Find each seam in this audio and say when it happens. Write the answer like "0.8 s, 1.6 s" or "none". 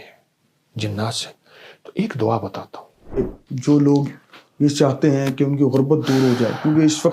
3.2 s